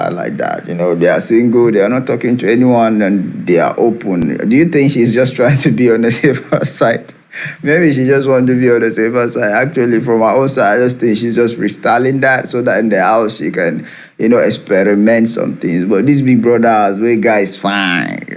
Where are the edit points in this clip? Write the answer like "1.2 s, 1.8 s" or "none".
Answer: none